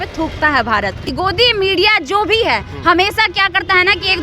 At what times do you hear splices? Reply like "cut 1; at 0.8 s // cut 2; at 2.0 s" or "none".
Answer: cut 1; at 1.0 s